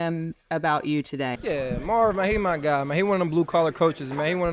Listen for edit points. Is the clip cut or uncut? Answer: cut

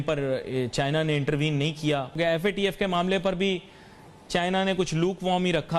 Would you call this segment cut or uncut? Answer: cut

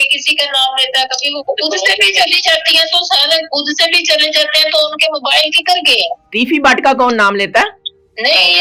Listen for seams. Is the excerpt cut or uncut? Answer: uncut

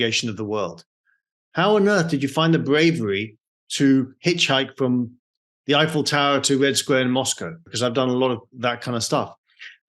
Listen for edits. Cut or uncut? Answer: cut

